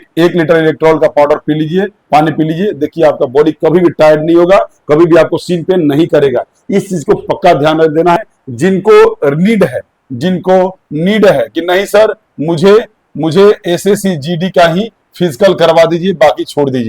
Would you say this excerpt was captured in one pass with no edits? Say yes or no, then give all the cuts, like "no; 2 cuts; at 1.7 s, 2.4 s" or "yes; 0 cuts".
no; 1 cut; at 8.2 s